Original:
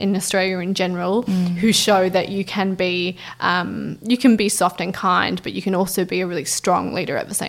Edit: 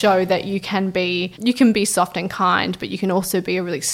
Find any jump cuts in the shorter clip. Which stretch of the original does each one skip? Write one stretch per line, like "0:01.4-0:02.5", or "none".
0:03.2-0:04.0